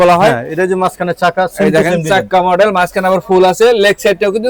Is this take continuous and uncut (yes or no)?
yes